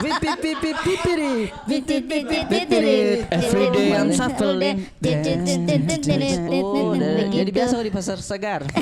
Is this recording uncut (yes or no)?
yes